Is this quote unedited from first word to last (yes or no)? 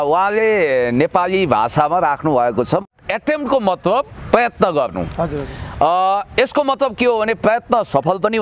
no